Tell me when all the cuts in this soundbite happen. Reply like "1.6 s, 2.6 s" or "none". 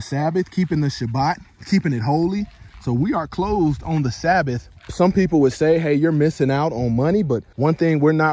4.8 s, 7.5 s